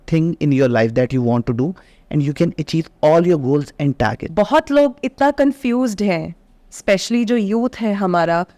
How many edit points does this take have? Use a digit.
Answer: 1